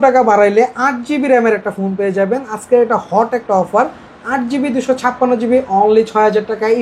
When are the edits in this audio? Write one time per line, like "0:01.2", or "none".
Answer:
none

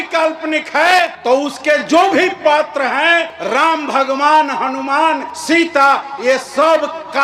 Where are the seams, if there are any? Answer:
0:01.2
0:03.4
0:05.3

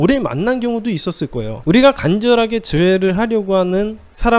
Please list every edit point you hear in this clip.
none

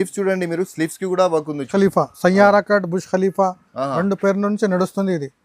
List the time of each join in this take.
0:01.7

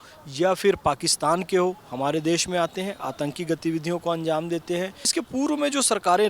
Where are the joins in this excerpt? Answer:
0:05.1

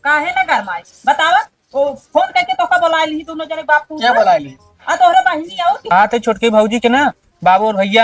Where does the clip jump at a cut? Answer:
0:05.8

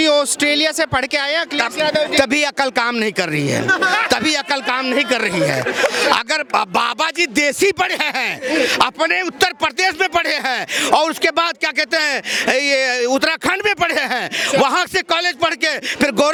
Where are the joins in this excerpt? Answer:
none

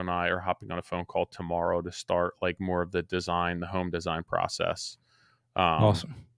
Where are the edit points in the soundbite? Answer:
none

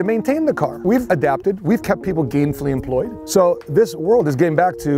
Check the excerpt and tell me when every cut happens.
0:01.0
0:03.2

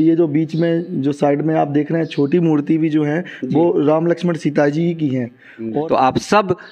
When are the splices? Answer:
0:05.7

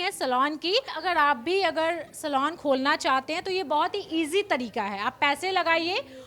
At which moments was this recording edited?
0:00.9

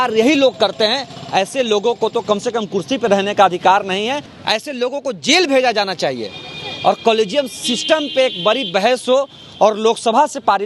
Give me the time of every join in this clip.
0:04.3

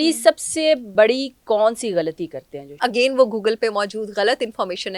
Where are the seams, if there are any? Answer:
0:00.9
0:02.8

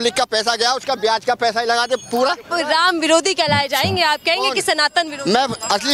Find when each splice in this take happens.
0:02.4

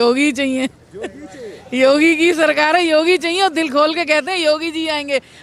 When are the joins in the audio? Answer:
none

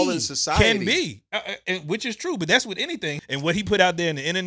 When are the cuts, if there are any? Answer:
0:03.2

